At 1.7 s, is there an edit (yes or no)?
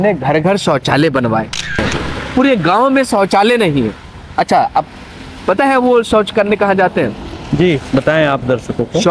yes